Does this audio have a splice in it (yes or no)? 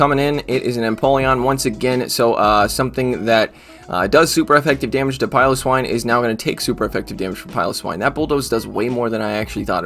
no